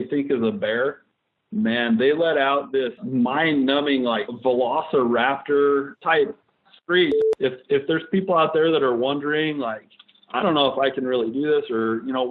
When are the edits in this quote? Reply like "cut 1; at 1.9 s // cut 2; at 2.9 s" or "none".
cut 1; at 3.0 s // cut 2; at 4.3 s // cut 3; at 5.9 s // cut 4; at 7.2 s